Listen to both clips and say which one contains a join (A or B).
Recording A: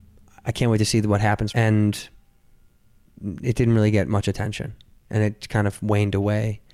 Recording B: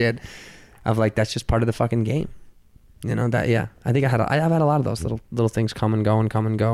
A